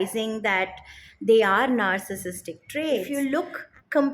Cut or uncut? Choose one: cut